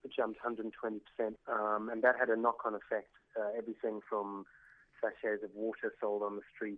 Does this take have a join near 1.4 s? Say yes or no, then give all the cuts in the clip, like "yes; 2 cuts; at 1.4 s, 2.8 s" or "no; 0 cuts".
yes; 1 cut; at 1.4 s